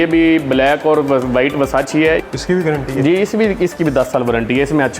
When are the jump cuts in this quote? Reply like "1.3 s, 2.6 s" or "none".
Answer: 2.2 s